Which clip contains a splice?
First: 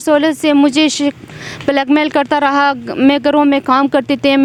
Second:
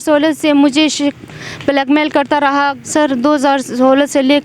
second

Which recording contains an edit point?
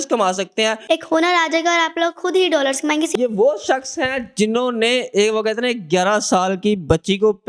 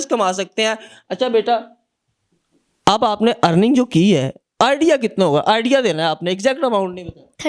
first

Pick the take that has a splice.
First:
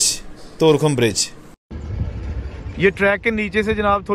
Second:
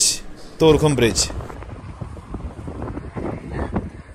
second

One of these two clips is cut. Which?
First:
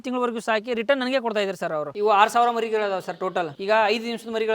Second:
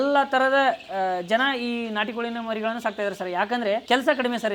first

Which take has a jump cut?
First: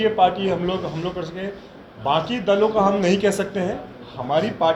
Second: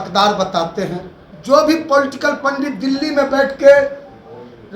second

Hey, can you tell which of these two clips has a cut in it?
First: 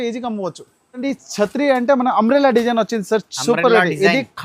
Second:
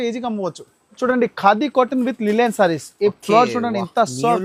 first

